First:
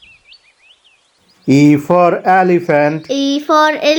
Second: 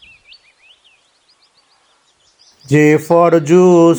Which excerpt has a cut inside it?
first; 1 cut; at 1.1 s

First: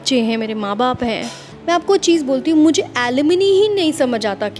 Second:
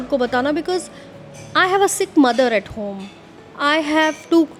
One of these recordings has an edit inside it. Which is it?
first; 1 cut; at 1.5 s

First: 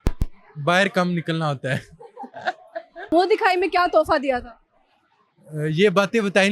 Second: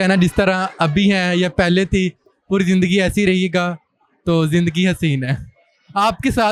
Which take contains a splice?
first; 1 cut; at 3.1 s

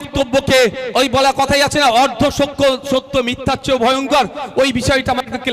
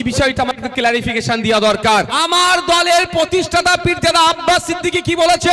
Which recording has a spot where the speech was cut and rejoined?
second; 1 cut; at 2.1 s

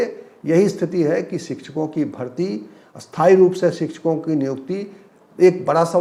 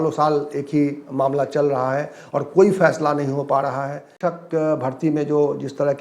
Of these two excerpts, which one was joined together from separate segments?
second; 1 cut; at 4.1 s

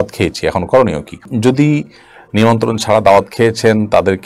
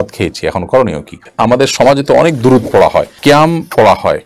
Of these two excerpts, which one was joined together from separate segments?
second; 2 cuts; at 1.1 s, 3.1 s

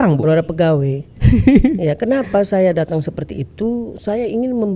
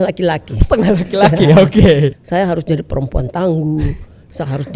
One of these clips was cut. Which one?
second; 1 cut; at 2.1 s

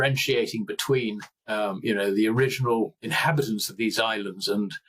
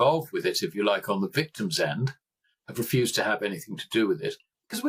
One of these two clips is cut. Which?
first; 2 cuts; at 1.3 s, 3.0 s

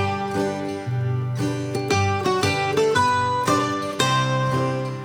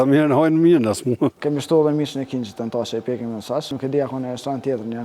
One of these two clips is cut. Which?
second; 2 cuts; at 1.4 s, 3.7 s

